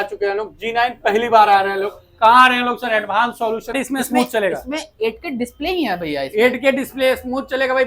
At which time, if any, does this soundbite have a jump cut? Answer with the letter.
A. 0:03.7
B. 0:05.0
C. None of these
A